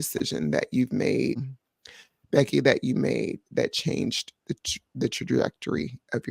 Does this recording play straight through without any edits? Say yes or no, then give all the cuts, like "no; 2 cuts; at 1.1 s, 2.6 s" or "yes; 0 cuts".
no; 1 cut; at 1.5 s